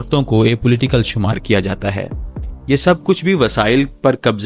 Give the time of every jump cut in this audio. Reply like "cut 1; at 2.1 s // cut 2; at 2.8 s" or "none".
none